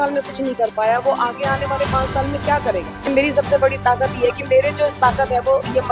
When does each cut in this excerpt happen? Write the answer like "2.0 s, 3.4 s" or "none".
3.0 s